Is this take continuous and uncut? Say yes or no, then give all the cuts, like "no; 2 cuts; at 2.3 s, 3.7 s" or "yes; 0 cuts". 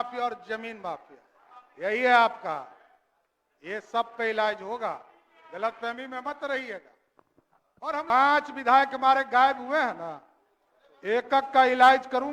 no; 1 cut; at 8.1 s